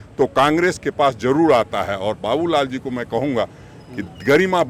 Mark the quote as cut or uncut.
uncut